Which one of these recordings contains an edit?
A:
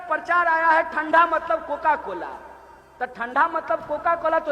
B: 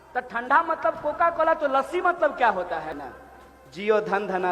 B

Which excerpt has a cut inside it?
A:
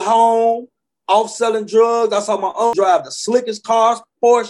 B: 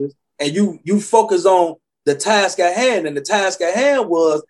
A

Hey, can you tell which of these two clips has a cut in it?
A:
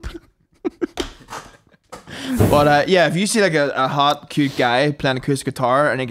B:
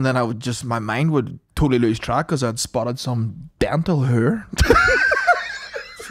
A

